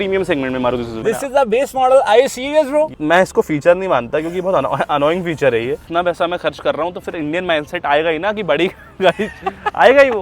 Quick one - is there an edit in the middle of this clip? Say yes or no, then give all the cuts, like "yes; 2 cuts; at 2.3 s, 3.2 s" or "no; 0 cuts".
yes; 3 cuts; at 0.9 s, 2.9 s, 5.8 s